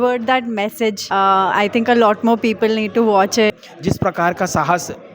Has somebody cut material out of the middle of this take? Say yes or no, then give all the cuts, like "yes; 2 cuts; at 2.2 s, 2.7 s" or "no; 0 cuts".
yes; 2 cuts; at 1.0 s, 3.5 s